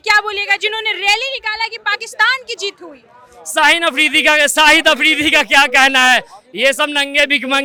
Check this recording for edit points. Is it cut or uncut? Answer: uncut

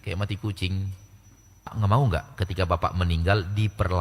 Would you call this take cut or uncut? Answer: cut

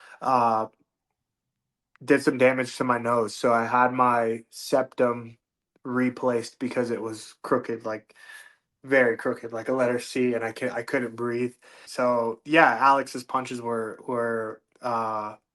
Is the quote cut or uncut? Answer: cut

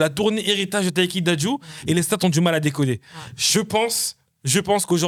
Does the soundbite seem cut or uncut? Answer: uncut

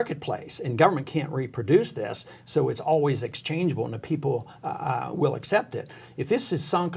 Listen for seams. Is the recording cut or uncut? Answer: uncut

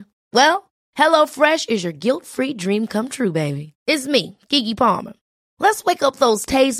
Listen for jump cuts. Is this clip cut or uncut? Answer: uncut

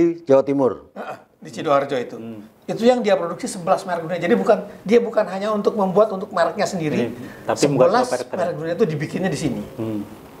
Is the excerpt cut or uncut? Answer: uncut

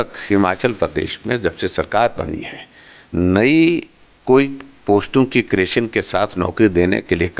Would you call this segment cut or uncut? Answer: uncut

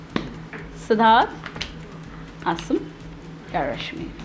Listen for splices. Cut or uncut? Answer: uncut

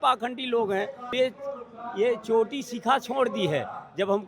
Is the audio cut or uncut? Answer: cut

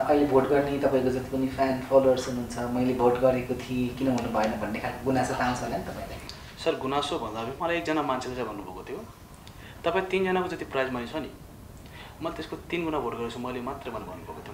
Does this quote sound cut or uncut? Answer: uncut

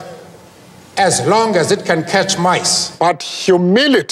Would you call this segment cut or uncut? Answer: cut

